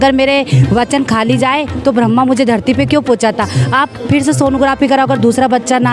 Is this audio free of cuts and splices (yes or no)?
yes